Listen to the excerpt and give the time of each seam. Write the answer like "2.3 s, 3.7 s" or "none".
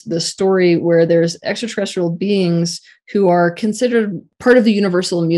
4.3 s

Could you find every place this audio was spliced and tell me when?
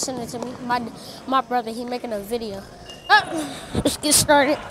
3.1 s

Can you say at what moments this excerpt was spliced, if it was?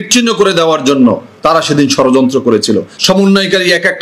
2.9 s

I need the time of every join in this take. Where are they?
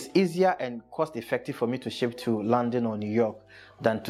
none

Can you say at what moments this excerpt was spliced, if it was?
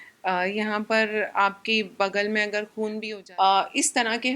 3.1 s

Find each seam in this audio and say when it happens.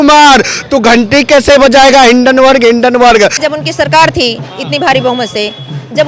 3.4 s

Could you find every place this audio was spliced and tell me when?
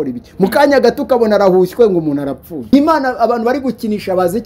2.7 s

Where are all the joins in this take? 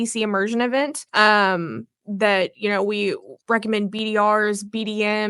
1.0 s, 3.3 s

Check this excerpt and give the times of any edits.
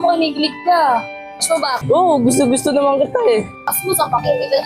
3.8 s

